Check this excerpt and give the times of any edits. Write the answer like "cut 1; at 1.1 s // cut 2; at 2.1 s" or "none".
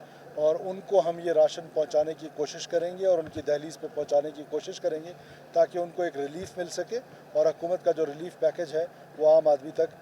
none